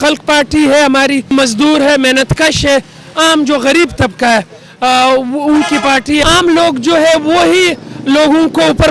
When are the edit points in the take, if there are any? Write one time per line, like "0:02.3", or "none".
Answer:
0:01.3
0:06.2